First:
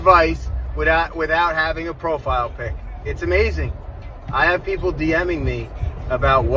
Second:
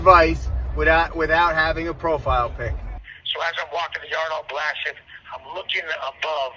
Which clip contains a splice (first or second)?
second